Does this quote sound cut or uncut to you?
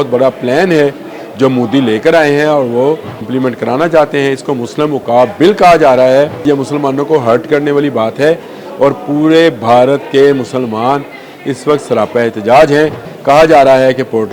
cut